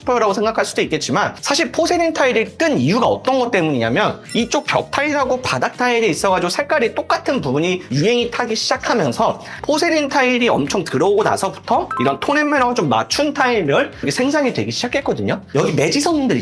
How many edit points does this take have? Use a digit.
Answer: 0